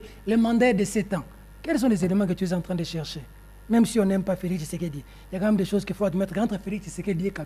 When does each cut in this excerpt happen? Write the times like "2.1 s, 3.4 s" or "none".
none